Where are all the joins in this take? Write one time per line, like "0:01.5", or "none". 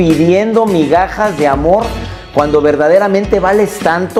none